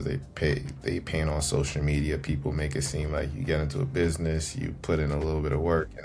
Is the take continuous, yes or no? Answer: yes